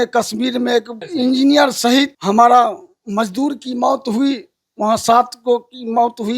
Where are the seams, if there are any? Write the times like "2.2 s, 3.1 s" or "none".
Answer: 1.0 s, 2.2 s